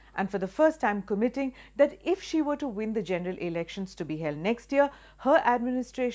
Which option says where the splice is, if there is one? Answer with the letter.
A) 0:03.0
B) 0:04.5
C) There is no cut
C